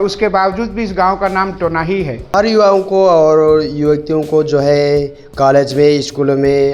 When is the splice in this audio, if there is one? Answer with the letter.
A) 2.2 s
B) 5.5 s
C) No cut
A